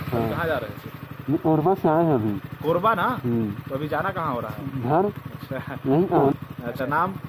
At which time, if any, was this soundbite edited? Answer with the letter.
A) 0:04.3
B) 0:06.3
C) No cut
B